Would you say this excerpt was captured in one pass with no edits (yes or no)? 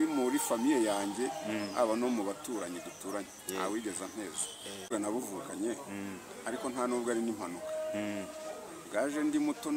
no